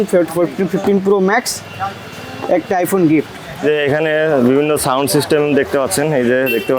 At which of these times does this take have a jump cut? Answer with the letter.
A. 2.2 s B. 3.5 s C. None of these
B